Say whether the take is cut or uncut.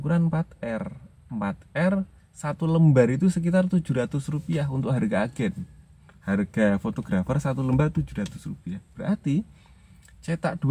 uncut